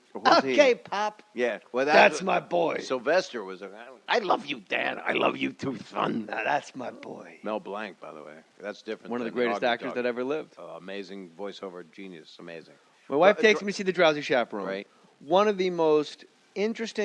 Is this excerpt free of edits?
yes; 0 cuts

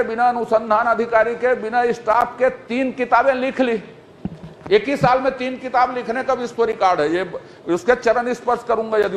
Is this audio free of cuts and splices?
yes; 0 cuts

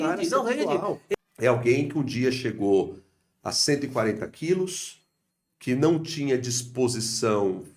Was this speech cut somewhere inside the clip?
yes; 1 cut; at 1.1 s

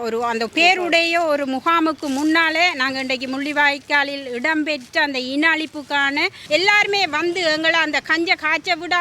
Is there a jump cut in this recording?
yes; 1 cut; at 6.4 s

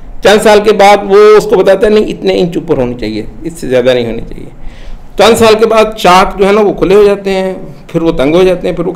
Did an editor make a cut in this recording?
no; 0 cuts

